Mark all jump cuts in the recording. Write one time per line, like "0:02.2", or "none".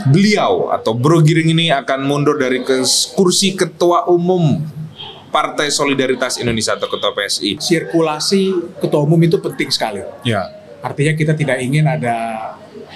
0:07.6